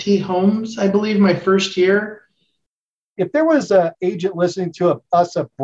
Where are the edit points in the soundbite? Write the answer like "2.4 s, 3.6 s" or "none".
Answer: 3.1 s